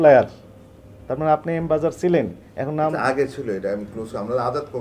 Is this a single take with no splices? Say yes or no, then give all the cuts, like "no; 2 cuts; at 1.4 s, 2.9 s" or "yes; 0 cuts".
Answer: yes; 0 cuts